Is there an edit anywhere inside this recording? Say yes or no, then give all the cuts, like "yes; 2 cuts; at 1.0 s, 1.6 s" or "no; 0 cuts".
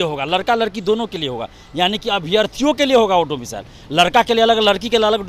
no; 0 cuts